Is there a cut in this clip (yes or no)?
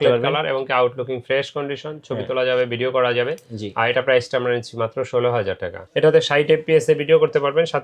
yes